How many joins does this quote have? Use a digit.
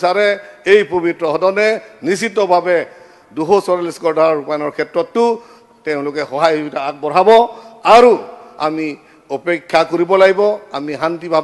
0